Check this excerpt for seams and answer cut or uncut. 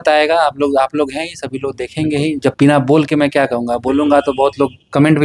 uncut